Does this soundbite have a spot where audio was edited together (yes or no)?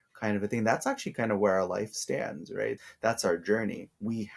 yes